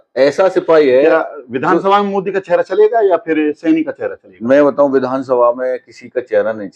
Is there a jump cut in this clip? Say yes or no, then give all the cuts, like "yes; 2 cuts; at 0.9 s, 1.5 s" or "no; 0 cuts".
no; 0 cuts